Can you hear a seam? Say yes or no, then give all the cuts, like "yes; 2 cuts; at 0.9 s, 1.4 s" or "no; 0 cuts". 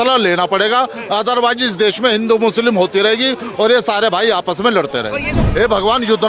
yes; 1 cut; at 5.4 s